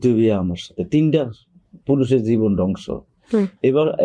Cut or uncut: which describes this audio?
uncut